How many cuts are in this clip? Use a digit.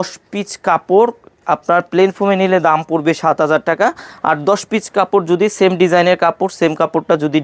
0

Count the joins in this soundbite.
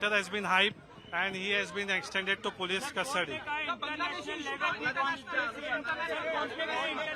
0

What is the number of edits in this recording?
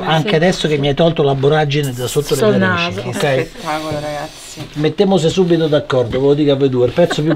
0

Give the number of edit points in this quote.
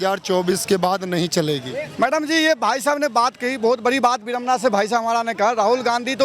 0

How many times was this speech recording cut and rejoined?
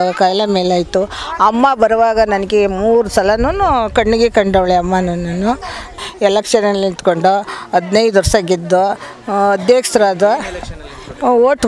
1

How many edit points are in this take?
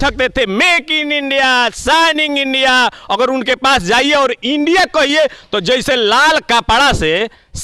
0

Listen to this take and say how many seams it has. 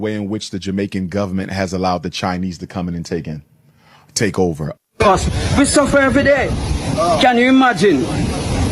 1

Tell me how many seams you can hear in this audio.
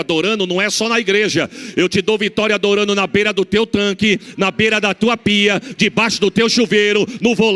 0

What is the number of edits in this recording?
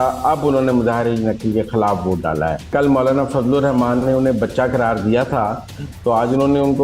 1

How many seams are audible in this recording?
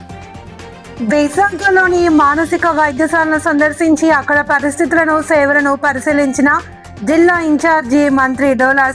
1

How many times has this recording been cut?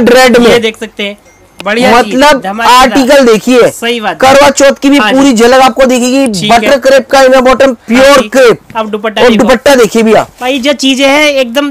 0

